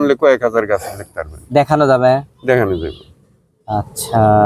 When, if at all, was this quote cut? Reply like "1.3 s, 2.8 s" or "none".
none